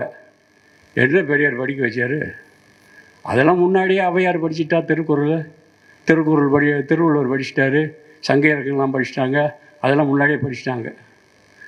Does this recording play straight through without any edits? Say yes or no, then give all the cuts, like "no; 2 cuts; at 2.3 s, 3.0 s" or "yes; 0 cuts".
yes; 0 cuts